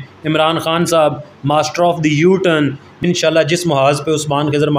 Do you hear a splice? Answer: yes; 1 cut; at 2.9 s

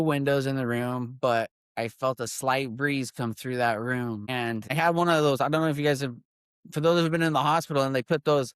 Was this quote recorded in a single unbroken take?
no; 1 cut; at 4.7 s

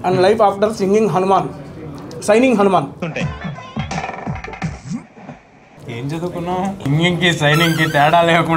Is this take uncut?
no; 3 cuts; at 3.1 s, 5.7 s, 6.8 s

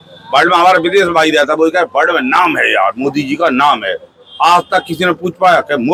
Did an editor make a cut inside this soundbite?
no; 0 cuts

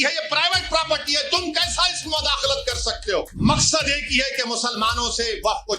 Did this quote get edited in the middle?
yes; 1 cut; at 3.3 s

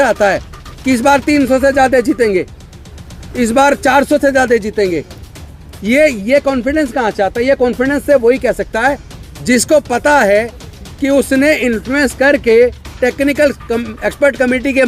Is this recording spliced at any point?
no; 0 cuts

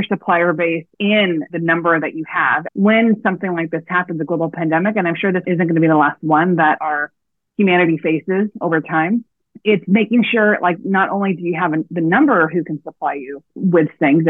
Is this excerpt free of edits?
no; 1 cut; at 2.6 s

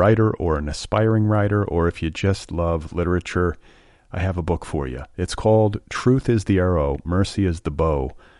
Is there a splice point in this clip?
no; 0 cuts

